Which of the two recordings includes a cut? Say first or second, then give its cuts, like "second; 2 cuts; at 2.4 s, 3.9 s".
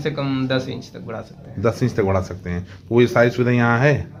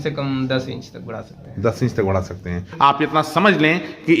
second; 1 cut; at 2.7 s